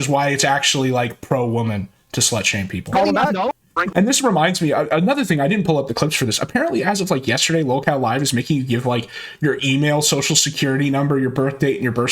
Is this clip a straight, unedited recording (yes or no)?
no